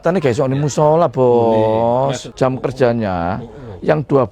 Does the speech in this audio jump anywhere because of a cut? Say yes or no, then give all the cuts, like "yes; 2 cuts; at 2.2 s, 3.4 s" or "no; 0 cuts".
yes; 1 cut; at 2.2 s